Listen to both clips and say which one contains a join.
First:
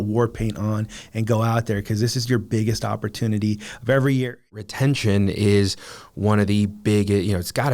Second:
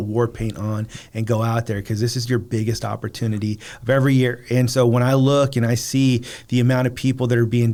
first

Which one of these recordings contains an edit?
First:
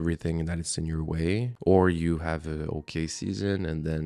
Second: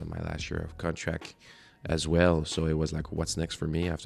first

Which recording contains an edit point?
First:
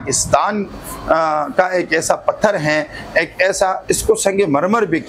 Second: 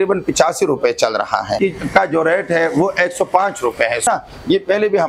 second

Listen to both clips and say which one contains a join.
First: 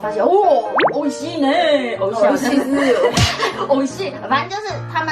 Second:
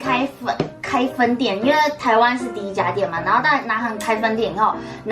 second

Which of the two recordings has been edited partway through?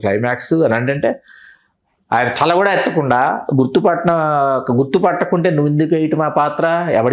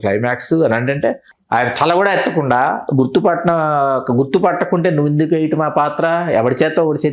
second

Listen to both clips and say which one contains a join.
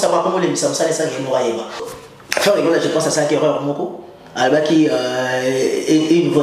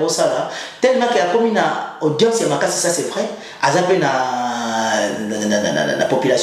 first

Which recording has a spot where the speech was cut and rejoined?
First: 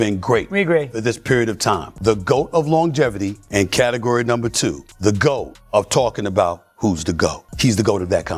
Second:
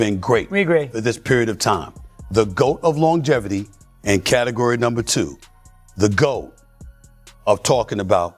first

